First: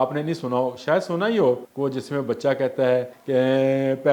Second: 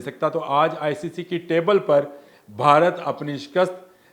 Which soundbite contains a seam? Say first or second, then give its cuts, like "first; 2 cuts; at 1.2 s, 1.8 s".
first; 2 cuts; at 1.7 s, 3.1 s